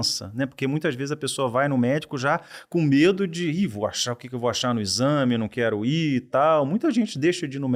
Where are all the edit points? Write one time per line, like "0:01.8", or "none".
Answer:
none